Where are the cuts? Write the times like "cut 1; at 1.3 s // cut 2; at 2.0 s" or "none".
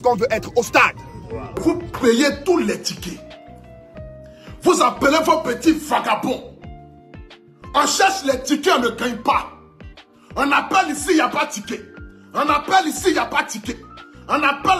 cut 1; at 1.6 s